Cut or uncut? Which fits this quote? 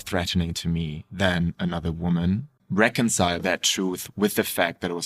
cut